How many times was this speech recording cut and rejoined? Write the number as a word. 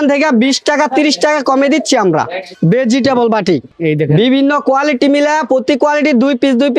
two